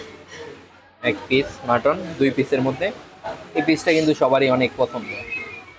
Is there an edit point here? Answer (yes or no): no